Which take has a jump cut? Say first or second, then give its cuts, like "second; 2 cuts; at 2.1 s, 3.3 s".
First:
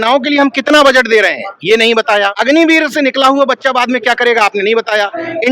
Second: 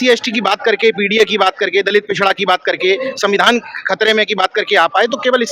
first; 1 cut; at 2.4 s